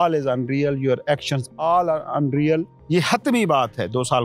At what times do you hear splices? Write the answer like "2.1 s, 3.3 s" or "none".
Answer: 2.8 s